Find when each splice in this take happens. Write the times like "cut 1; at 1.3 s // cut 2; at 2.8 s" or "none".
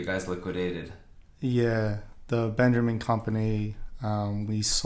none